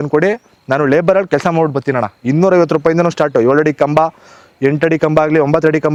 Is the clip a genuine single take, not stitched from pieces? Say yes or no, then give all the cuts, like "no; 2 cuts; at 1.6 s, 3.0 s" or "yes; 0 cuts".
yes; 0 cuts